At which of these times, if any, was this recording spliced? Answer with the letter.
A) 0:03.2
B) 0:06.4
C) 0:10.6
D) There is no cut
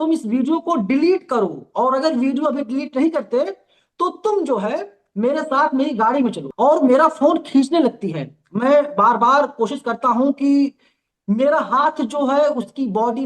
B